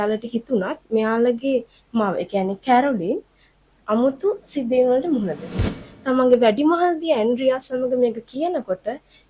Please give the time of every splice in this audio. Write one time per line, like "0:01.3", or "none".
0:05.7